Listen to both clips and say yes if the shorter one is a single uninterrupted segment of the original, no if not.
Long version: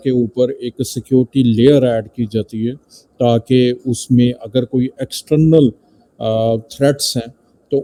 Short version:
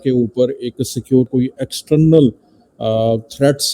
no